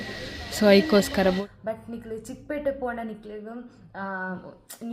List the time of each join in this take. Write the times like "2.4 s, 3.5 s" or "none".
1.4 s

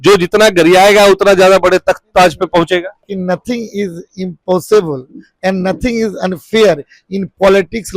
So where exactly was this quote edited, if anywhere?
3.1 s

